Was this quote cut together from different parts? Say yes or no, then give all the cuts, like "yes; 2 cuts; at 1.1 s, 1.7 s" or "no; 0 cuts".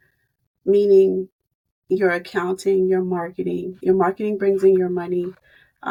no; 0 cuts